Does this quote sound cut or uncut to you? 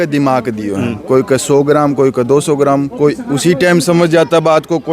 uncut